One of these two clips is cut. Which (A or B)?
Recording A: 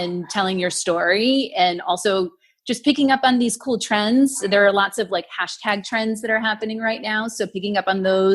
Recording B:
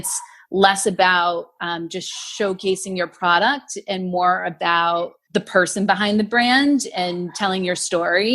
B